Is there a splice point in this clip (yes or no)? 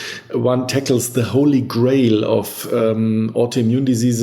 no